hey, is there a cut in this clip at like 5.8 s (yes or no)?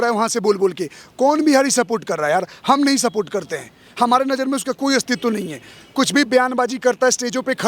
no